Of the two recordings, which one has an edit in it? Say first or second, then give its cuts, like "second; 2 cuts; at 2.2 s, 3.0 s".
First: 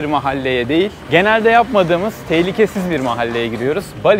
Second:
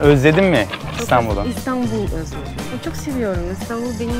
first; 1 cut; at 1.0 s